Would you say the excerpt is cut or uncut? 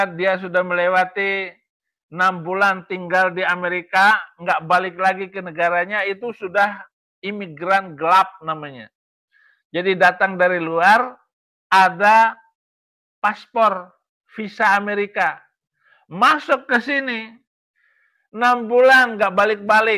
uncut